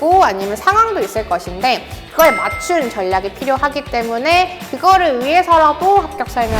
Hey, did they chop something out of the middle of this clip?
no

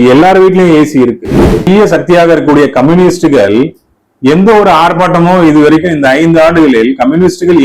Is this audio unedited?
no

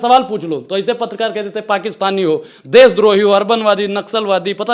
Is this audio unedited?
yes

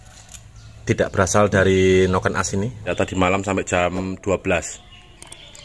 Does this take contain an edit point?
yes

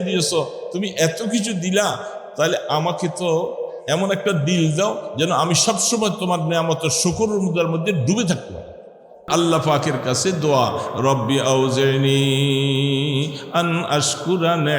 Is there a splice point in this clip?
yes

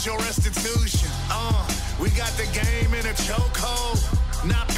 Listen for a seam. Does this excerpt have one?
no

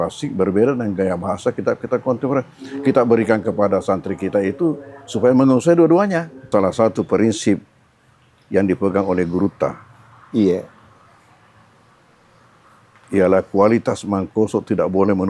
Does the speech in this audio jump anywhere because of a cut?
yes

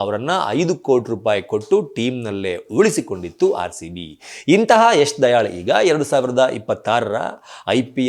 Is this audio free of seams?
yes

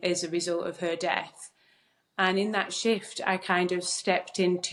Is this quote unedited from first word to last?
yes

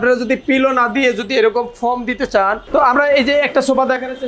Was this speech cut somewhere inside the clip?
yes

